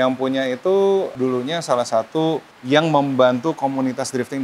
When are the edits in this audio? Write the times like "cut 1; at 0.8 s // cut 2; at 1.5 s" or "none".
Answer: cut 1; at 1.1 s // cut 2; at 2.5 s

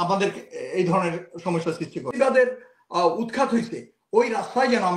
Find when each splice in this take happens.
cut 1; at 2.1 s

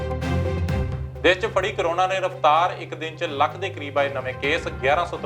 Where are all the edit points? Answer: cut 1; at 0.9 s

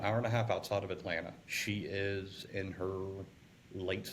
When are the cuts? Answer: cut 1; at 1.5 s

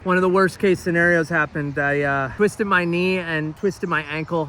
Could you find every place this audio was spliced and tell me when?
none

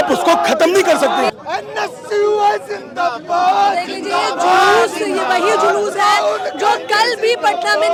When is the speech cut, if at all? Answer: none

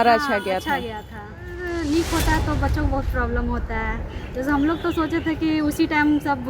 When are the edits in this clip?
cut 1; at 1.6 s

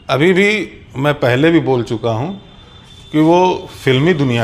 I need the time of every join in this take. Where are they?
none

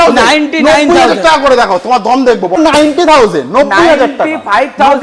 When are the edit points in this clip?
cut 1; at 2.6 s

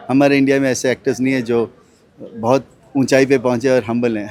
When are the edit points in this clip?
none

